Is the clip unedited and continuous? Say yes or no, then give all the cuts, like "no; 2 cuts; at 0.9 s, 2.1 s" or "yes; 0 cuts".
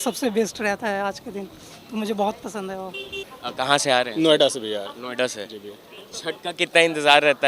yes; 0 cuts